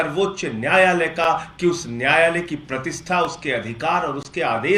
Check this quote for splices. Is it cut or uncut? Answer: uncut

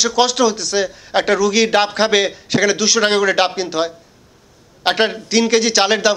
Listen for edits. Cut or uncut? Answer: uncut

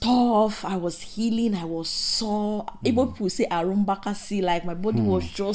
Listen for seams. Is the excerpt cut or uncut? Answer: uncut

